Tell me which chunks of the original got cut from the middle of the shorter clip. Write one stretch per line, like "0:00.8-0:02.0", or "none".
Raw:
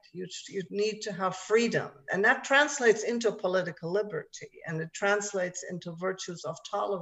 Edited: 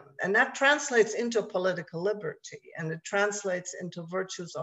none